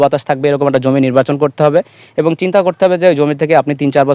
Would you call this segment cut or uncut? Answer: uncut